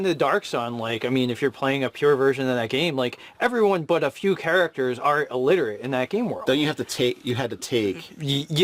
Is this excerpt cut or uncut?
uncut